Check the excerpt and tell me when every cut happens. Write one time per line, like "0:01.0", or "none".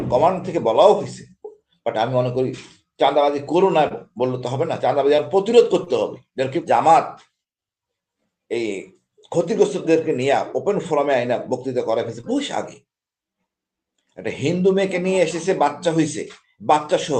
0:06.6